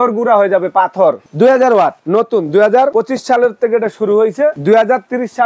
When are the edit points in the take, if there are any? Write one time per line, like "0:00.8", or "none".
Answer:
0:01.2
0:02.0
0:02.9
0:04.6